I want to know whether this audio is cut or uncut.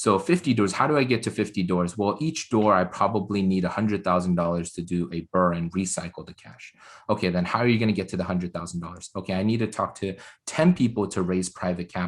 uncut